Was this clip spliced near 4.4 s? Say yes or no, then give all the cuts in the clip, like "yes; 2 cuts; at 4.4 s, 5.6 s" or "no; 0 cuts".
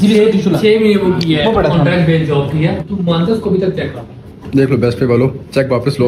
yes; 2 cuts; at 2.9 s, 4.4 s